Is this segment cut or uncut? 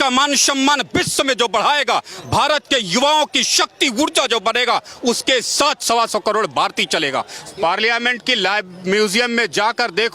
cut